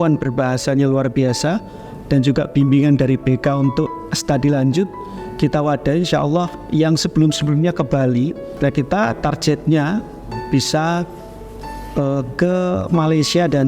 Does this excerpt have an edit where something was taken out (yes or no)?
yes